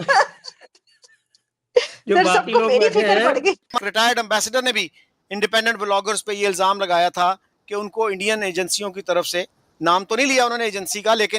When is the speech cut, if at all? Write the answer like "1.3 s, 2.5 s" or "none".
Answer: 3.7 s